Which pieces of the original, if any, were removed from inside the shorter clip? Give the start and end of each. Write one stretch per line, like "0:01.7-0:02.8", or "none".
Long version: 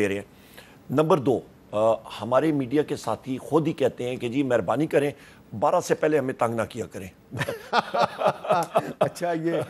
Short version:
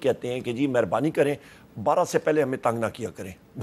none